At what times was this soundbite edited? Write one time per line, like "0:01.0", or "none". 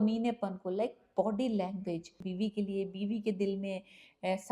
0:02.2